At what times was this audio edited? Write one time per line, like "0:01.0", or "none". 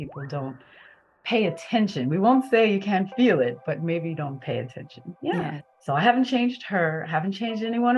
0:05.7

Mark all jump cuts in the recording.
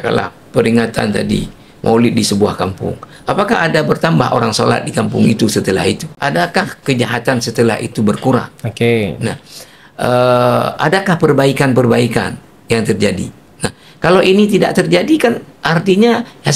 0:06.1

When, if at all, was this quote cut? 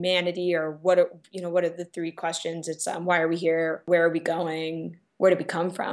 0:03.8
0:05.0

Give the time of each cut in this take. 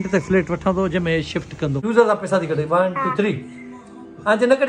0:01.8

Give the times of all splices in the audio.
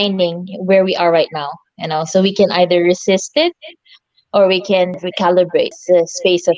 0:05.0
0:05.8

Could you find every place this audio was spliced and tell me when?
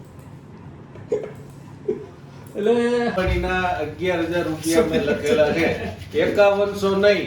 0:03.1

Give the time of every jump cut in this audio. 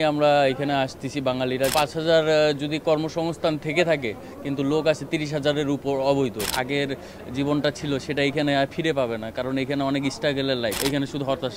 0:01.7
0:06.5
0:10.8

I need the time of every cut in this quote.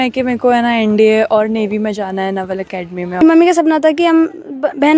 0:03.2

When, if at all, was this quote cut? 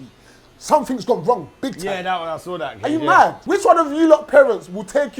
0:03.4

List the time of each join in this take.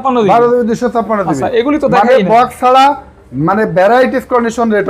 none

